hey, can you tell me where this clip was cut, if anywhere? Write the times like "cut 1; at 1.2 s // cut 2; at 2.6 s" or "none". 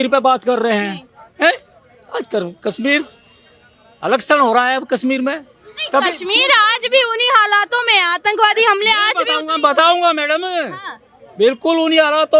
none